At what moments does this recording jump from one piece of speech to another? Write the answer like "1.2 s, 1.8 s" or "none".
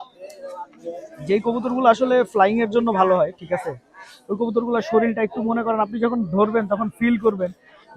1.1 s

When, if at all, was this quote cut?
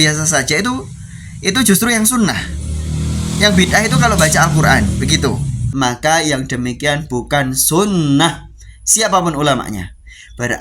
5.7 s

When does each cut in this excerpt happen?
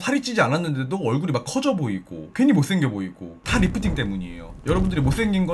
4.5 s

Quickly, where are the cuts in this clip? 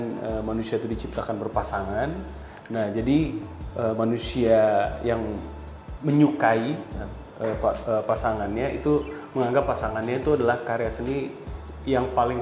none

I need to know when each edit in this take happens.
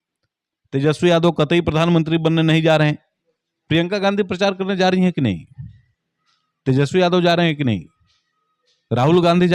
3.1 s

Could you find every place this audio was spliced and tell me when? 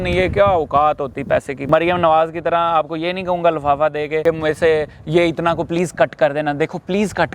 1.6 s, 4.2 s

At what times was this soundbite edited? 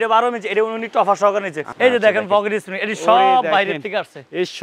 1.6 s

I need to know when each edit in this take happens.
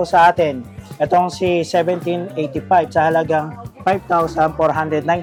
none

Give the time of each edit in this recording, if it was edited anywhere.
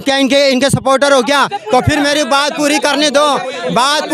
none

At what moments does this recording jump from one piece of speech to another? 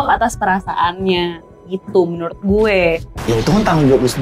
none

